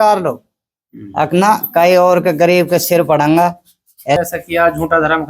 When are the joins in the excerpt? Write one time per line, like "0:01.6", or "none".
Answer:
0:04.2